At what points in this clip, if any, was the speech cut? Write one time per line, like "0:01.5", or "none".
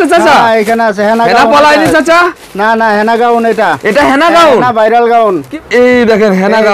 0:05.5

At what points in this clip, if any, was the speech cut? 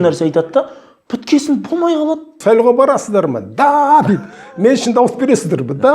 0:02.3

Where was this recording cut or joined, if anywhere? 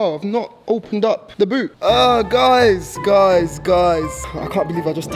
0:01.2
0:04.2

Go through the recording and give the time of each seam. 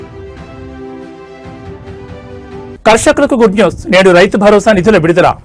0:02.7

